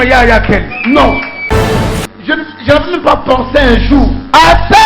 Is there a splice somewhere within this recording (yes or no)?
yes